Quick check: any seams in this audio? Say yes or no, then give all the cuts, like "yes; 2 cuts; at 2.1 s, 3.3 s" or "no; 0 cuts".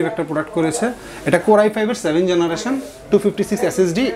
no; 0 cuts